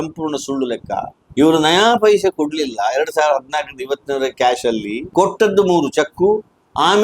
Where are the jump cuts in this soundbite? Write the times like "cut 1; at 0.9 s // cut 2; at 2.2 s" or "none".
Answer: cut 1; at 1.2 s // cut 2; at 5.0 s